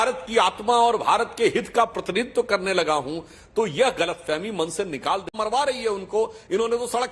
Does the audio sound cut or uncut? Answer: cut